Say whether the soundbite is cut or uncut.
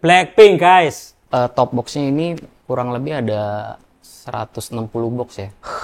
cut